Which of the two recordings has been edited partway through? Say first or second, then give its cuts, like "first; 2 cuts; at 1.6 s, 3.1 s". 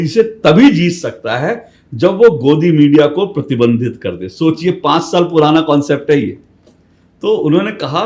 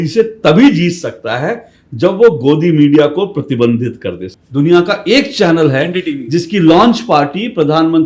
second; 1 cut; at 4.3 s